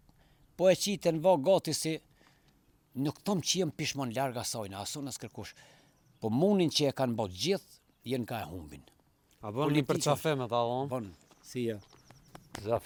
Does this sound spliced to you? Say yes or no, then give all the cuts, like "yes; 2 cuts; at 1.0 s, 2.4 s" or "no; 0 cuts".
no; 0 cuts